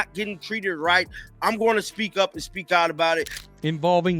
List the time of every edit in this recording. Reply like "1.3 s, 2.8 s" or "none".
3.3 s